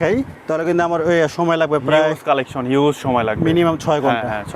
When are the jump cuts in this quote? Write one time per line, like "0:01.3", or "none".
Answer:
none